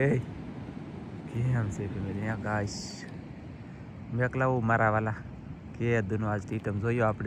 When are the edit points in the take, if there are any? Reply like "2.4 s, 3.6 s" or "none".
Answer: none